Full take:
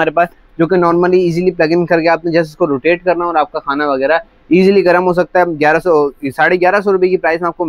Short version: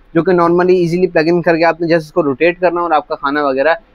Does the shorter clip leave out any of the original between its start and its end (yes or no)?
no